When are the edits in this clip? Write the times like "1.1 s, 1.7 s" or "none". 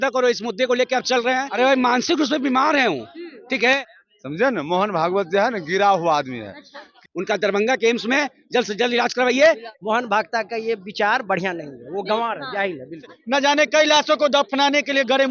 1.5 s, 3.8 s, 7.0 s, 9.7 s, 13.1 s